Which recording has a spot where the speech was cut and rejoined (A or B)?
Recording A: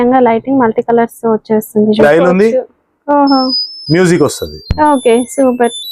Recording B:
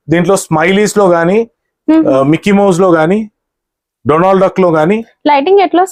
A